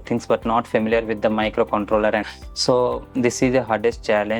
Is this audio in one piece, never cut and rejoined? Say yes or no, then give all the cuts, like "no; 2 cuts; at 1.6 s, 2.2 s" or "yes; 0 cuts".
no; 1 cut; at 2.2 s